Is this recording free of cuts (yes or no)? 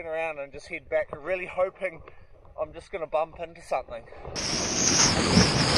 no